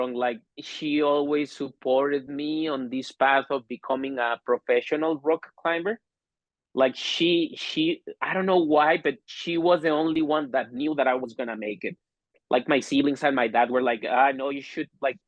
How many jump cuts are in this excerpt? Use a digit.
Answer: 1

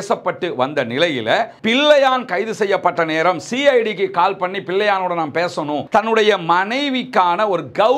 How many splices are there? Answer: 2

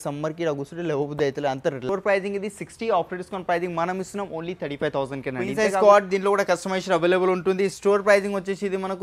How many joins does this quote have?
2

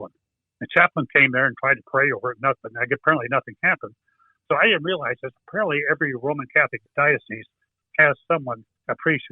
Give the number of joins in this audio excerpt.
1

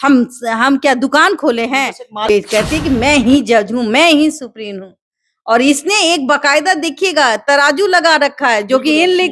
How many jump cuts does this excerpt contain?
1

